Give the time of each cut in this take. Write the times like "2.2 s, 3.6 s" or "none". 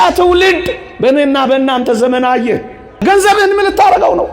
3.0 s

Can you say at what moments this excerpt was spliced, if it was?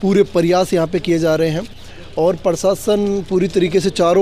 none

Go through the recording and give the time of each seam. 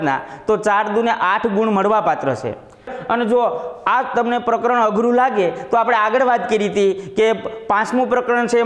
3.0 s

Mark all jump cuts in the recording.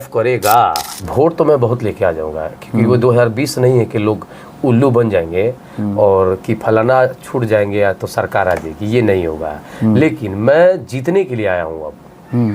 0.9 s

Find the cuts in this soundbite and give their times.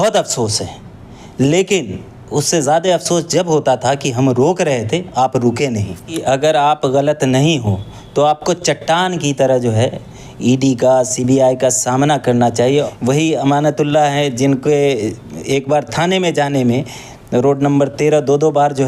6.1 s, 12.7 s

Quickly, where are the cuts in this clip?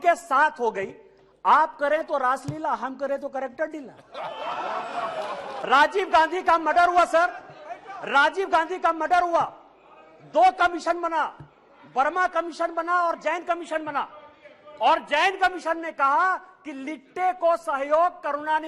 5.5 s

